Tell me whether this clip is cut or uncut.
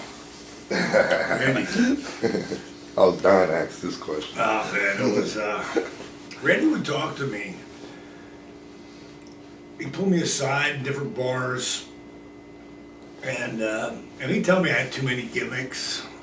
uncut